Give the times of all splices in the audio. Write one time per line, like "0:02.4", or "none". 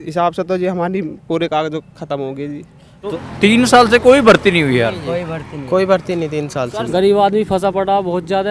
0:03.1
0:06.8